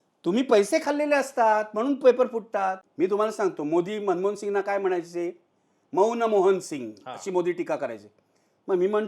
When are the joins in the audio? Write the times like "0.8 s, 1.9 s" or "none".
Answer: 2.8 s